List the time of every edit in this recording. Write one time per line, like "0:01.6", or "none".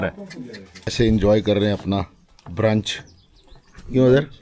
0:00.9